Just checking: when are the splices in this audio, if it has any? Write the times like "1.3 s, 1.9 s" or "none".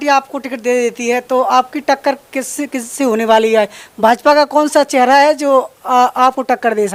none

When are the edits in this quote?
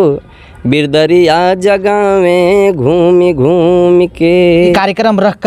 4.6 s

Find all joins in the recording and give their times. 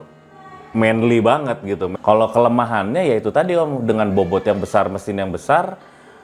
1.9 s

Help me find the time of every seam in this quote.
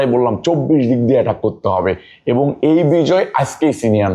none

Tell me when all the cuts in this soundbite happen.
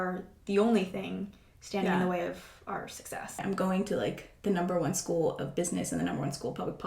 3.4 s

